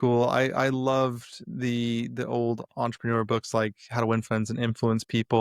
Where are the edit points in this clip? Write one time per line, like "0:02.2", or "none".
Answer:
none